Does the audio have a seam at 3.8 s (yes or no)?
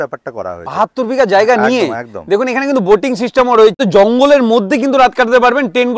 yes